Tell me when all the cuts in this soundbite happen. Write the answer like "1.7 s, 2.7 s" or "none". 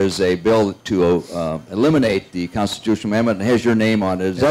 none

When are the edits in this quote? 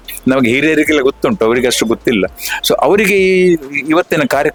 none

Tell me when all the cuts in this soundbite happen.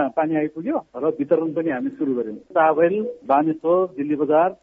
2.4 s

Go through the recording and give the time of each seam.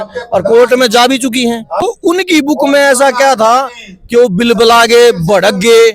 1.7 s

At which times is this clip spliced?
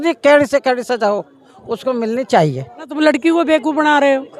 2.8 s

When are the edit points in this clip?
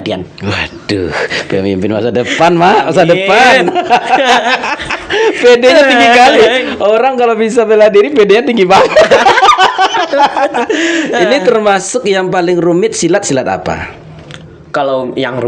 none

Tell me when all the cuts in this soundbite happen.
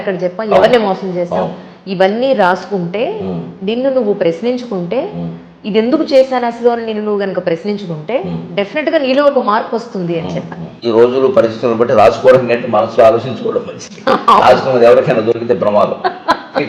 10.8 s

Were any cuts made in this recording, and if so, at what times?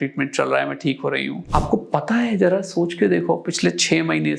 1.4 s

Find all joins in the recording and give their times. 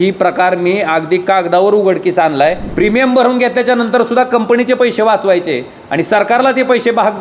2.6 s

